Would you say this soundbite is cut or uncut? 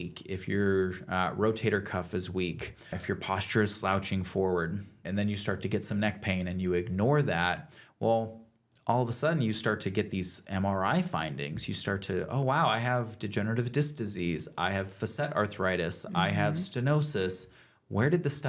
cut